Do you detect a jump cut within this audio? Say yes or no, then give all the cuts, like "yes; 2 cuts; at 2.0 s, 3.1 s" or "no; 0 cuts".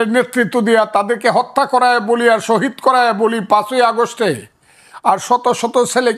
no; 0 cuts